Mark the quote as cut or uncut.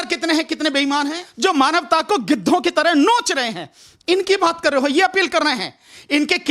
cut